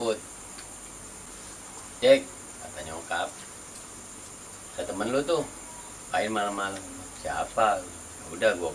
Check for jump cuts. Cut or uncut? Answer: cut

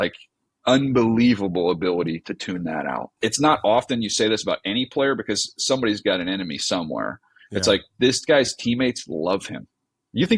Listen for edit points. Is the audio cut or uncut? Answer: cut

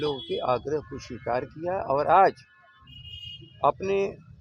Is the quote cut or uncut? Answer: uncut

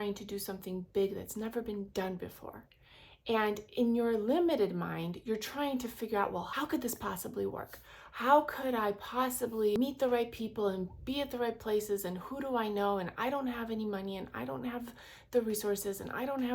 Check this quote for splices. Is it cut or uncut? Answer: cut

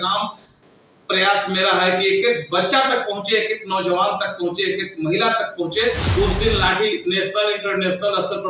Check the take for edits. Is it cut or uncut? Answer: cut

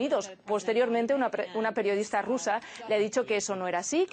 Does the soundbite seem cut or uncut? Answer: cut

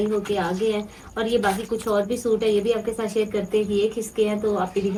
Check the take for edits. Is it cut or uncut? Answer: uncut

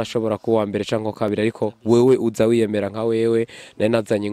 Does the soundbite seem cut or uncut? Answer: uncut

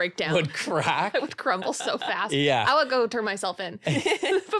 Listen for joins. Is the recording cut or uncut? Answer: uncut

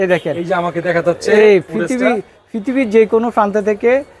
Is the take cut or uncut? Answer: uncut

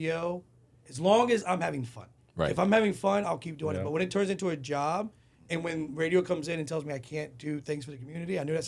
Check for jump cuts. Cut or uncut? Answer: uncut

